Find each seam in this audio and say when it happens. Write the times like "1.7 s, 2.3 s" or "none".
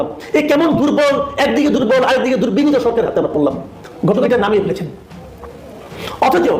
4.3 s

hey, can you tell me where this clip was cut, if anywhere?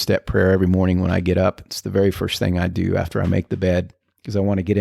none

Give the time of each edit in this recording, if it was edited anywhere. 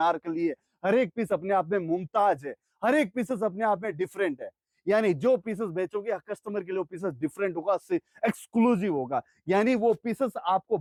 none

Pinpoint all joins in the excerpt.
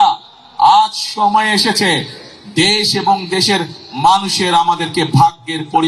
none

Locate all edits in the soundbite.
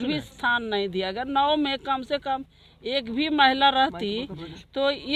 none

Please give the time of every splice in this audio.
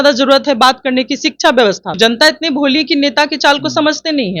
2.0 s

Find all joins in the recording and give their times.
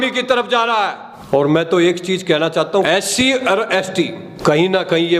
2.9 s

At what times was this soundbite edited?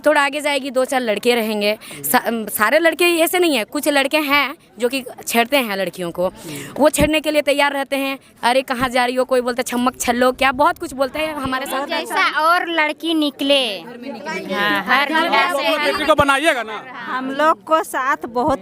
11.7 s

